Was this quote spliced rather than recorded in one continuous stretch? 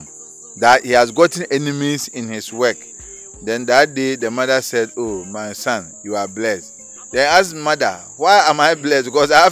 no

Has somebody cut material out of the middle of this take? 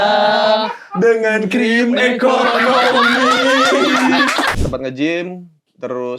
yes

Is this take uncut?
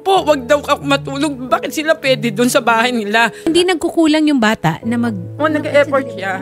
no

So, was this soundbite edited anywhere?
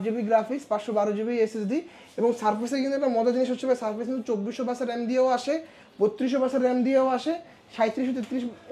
no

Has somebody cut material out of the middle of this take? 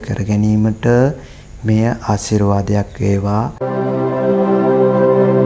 yes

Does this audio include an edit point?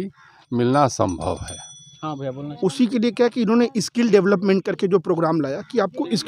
no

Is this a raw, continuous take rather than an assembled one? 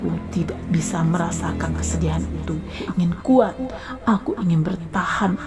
no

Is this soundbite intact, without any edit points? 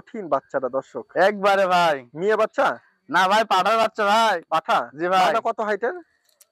yes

